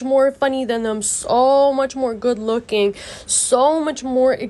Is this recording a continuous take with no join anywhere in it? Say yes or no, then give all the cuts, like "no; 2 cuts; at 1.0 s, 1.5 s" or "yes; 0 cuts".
yes; 0 cuts